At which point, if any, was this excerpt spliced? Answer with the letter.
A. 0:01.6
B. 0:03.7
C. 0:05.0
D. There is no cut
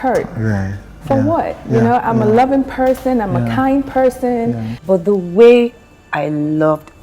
C